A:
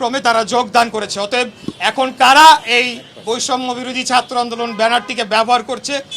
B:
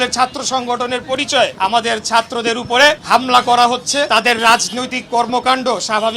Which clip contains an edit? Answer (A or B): B